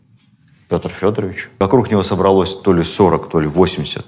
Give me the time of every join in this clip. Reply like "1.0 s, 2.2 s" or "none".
1.4 s